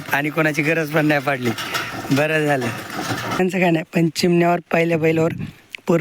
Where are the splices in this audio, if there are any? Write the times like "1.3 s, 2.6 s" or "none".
3.4 s